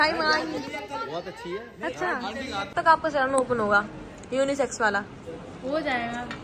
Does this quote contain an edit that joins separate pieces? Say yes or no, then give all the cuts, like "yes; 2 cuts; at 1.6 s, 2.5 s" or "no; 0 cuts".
yes; 1 cut; at 2.7 s